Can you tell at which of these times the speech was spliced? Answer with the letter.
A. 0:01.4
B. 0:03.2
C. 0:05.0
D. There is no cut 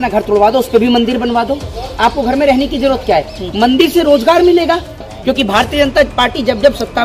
C